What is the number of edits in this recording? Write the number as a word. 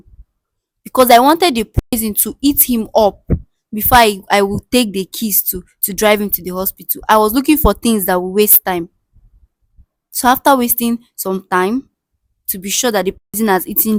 zero